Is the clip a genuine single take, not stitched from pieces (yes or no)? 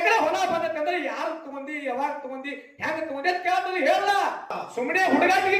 no